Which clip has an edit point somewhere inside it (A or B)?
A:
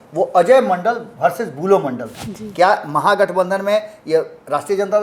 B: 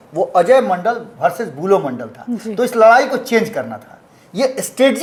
A